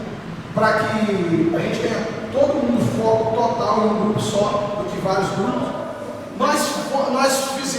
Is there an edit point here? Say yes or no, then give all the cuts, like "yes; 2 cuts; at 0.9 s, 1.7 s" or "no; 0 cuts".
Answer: yes; 1 cut; at 5.9 s